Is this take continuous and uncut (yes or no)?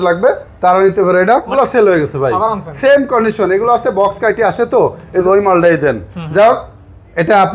no